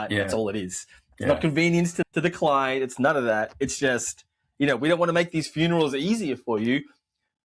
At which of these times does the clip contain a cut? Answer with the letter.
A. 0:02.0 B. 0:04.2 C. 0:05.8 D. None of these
A